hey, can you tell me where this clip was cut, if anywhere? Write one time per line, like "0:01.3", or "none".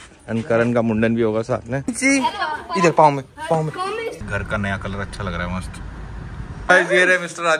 0:01.9
0:04.2
0:06.6